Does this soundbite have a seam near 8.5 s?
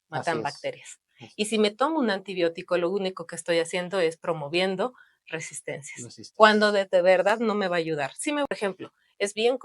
yes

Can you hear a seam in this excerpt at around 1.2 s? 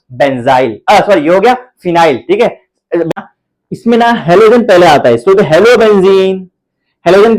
no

